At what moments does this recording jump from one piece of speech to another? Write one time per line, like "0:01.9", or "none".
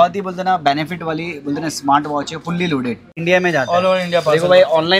0:03.2